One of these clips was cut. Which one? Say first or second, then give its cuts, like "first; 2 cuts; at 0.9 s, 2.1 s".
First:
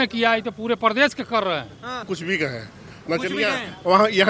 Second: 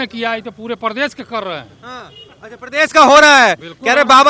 first; 1 cut; at 2.1 s